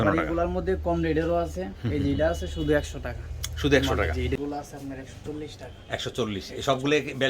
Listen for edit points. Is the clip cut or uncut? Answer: cut